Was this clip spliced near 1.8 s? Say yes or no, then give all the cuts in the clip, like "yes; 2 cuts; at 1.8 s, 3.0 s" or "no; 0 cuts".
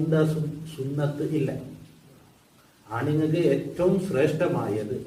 no; 0 cuts